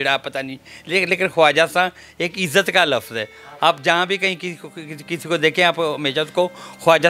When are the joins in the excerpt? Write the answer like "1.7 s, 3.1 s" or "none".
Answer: none